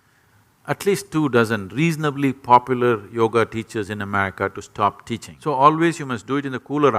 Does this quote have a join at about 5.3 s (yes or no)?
yes